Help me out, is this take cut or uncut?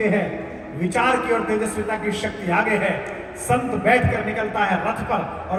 uncut